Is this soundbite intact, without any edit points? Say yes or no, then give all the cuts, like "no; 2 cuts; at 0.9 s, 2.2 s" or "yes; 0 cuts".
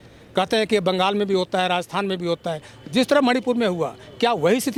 yes; 0 cuts